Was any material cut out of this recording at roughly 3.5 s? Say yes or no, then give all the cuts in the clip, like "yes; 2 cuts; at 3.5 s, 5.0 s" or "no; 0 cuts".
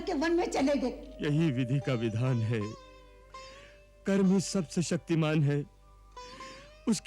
no; 1 cut; at 1.1 s